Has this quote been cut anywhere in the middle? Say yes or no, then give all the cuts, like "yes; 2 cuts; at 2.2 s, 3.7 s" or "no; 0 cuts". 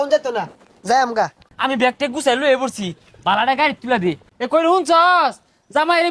yes; 2 cuts; at 1.4 s, 4.3 s